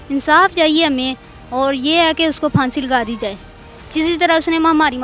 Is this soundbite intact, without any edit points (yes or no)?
yes